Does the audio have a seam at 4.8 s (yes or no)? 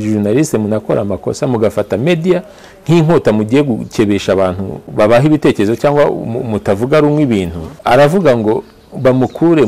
yes